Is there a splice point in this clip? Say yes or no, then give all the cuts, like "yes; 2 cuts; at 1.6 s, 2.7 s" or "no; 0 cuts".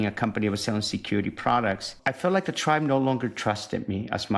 yes; 1 cut; at 1.9 s